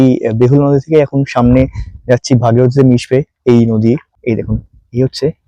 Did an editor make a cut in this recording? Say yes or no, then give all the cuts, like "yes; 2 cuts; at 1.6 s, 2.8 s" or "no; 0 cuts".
yes; 1 cut; at 4.1 s